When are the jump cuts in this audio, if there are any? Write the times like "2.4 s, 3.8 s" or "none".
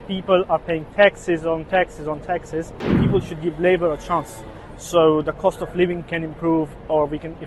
3.0 s